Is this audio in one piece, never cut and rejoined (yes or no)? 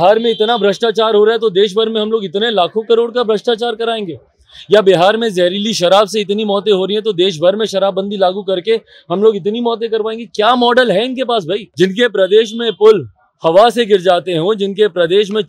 no